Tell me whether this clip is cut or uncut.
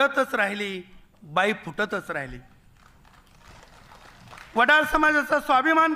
uncut